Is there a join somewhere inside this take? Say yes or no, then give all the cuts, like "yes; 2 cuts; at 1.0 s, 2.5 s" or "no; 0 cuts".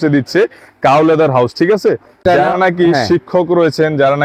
yes; 1 cut; at 2.1 s